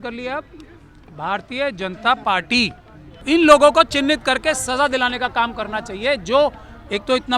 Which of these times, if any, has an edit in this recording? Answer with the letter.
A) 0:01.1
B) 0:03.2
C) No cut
B